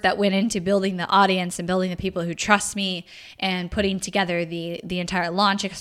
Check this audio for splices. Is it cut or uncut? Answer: uncut